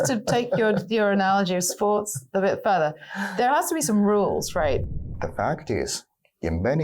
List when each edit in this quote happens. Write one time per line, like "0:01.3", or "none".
0:04.8